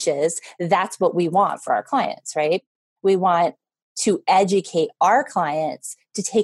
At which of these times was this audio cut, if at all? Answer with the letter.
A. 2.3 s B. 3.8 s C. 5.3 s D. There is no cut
D